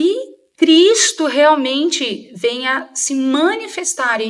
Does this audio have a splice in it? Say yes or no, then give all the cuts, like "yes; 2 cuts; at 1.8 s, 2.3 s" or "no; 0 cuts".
no; 0 cuts